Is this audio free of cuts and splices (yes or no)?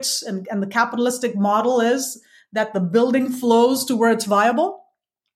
yes